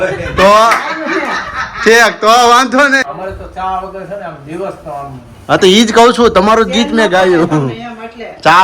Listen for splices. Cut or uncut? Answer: cut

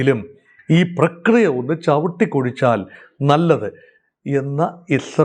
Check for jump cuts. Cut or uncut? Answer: uncut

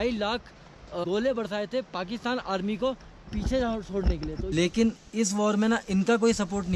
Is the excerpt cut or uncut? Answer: cut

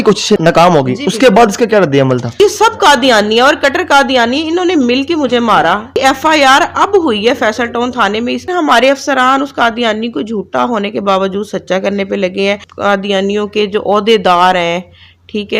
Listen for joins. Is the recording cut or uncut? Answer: cut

